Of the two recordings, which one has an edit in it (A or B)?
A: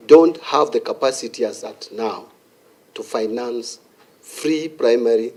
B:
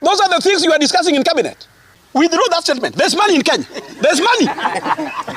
B